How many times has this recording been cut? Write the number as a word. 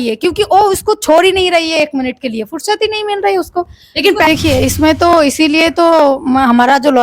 one